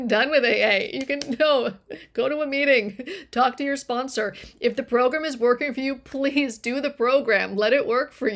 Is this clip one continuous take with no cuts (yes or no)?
yes